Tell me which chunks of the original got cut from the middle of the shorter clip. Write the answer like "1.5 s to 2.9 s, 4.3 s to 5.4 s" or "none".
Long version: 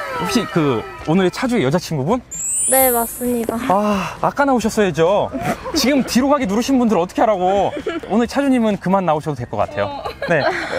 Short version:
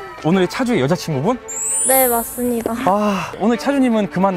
4.1 s to 8.0 s